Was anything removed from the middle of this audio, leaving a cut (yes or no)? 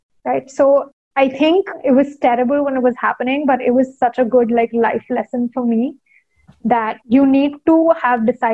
yes